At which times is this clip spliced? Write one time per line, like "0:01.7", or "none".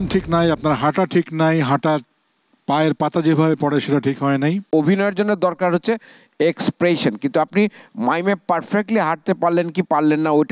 0:04.6